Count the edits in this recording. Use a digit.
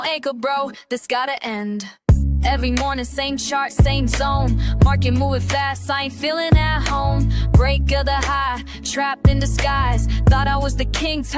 1